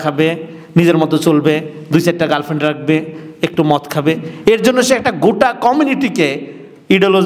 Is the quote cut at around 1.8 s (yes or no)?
no